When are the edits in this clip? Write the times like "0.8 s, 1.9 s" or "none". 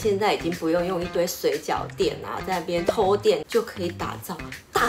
none